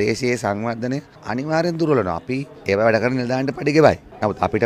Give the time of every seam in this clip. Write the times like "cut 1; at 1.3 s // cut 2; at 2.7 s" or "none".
none